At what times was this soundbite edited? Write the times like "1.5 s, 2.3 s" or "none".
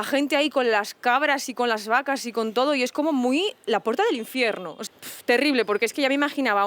4.7 s